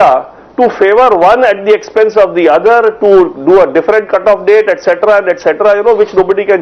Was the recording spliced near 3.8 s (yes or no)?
no